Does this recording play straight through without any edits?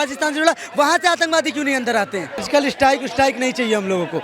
no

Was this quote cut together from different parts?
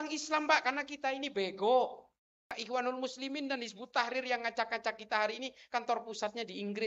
yes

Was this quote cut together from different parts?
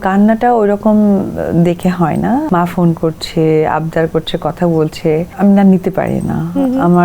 yes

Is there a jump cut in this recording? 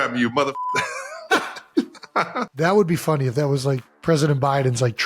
yes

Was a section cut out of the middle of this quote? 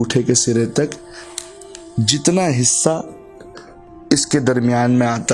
no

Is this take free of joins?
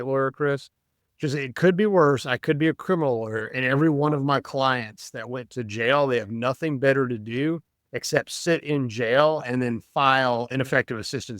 no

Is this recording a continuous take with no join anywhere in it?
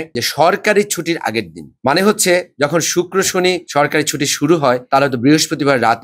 yes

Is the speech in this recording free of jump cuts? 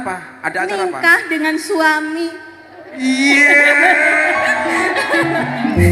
yes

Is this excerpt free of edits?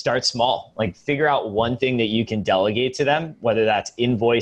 yes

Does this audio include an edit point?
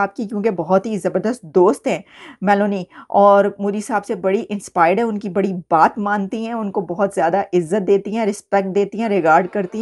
no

